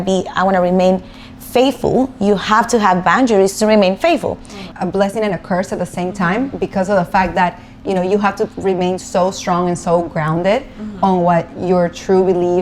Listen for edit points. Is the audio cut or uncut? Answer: cut